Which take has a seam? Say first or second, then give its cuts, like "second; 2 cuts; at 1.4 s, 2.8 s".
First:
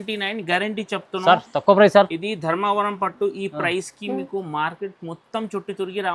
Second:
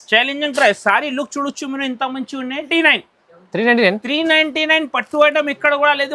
second; 1 cut; at 2.7 s